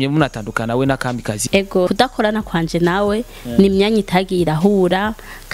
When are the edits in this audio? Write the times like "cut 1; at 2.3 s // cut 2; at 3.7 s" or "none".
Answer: cut 1; at 1.8 s